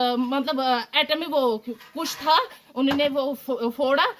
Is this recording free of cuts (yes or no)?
yes